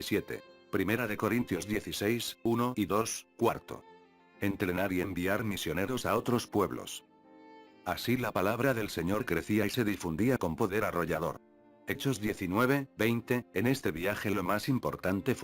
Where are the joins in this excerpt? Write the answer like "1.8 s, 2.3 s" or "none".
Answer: 4.9 s